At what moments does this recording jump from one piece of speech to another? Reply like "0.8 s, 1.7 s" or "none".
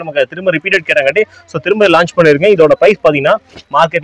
none